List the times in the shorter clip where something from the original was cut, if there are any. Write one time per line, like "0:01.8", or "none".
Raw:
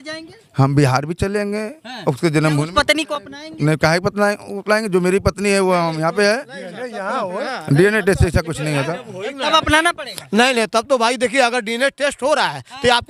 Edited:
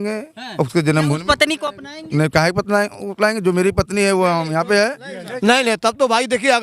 0:05.2